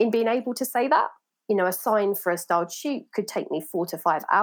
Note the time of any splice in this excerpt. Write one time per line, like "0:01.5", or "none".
0:01.3